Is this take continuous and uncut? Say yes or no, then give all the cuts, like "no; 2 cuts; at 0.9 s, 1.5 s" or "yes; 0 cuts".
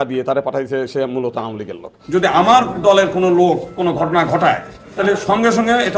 no; 1 cut; at 1.9 s